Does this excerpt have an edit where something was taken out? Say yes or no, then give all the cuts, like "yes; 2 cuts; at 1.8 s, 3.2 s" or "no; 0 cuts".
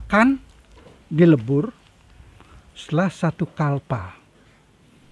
no; 0 cuts